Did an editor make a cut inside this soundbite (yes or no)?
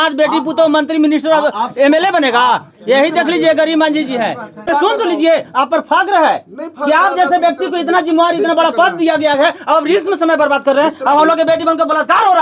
yes